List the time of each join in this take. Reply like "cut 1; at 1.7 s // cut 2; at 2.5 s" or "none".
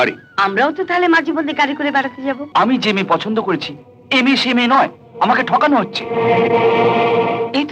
cut 1; at 2.4 s